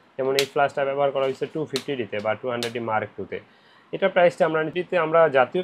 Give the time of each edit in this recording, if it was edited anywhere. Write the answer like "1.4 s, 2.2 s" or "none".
4.7 s

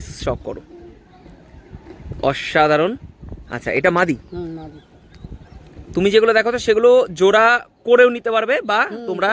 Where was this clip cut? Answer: none

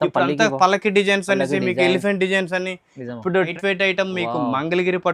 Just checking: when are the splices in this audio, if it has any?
3.5 s

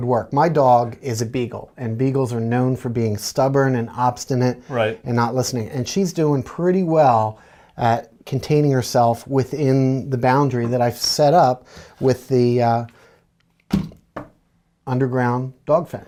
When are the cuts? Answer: none

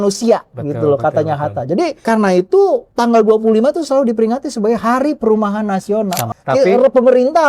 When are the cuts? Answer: 6.2 s

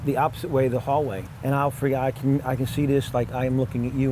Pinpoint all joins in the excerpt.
1.3 s

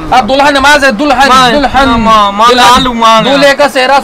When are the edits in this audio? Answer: none

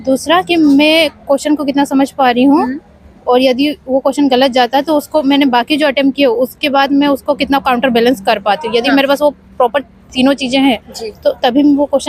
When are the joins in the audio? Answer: none

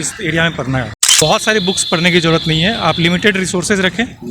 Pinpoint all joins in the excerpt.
1.1 s

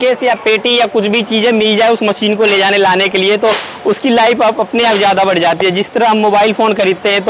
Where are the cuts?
none

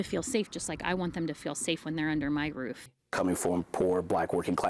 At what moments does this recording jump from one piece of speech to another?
2.9 s

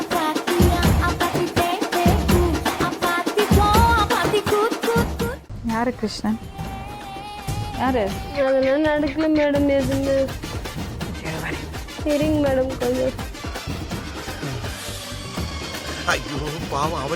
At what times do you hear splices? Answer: none

